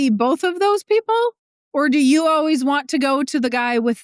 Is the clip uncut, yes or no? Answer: no